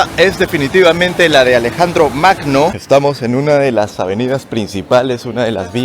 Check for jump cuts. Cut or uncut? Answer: cut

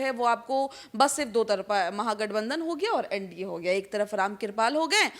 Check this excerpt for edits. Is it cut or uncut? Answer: uncut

